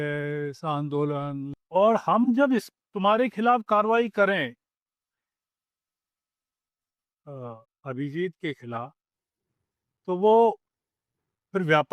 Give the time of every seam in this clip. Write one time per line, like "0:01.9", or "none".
0:01.5